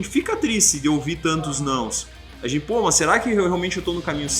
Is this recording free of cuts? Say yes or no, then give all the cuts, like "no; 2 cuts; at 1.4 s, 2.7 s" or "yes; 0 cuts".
yes; 0 cuts